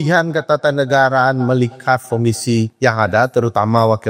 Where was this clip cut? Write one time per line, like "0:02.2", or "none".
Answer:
0:02.7